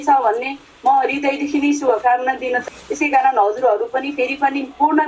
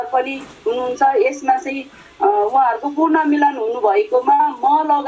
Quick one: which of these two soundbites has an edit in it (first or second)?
first